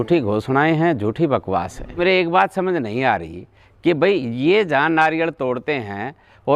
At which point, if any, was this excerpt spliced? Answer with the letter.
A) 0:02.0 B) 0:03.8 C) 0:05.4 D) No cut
A